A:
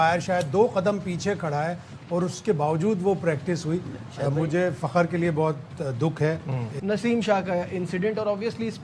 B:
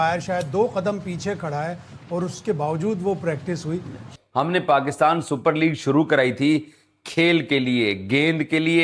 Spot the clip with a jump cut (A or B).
B